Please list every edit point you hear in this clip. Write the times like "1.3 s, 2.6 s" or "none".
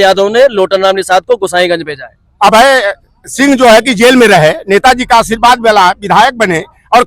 none